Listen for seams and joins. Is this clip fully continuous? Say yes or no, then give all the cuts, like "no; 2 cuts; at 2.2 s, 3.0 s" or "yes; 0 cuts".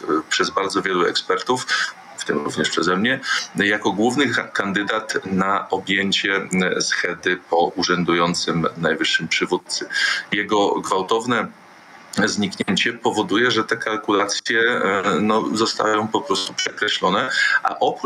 yes; 0 cuts